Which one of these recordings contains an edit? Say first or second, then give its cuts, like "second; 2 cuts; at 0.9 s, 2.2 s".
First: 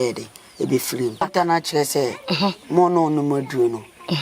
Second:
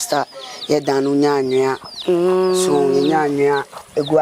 first; 1 cut; at 1.3 s